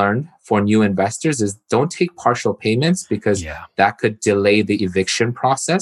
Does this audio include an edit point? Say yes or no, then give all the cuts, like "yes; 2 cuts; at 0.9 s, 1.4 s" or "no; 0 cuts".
no; 0 cuts